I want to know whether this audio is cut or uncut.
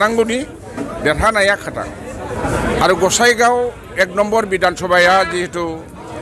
cut